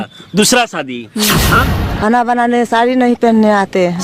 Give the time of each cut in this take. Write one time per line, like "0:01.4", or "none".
0:01.5